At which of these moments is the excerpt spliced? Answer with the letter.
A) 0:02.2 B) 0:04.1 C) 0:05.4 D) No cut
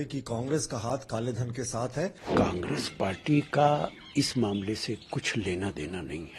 A